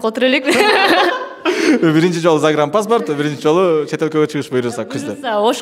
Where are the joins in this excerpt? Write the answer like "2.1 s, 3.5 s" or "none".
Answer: none